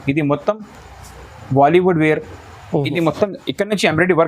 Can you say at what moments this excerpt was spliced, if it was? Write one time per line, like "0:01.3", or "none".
0:02.6